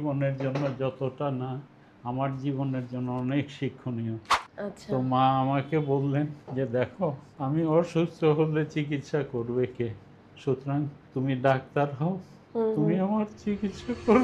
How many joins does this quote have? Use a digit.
4